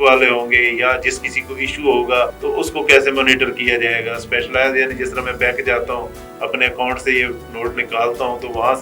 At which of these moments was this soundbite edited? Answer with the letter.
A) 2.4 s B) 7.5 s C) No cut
A